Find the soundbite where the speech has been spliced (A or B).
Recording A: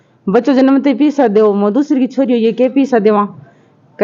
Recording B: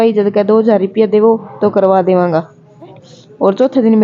B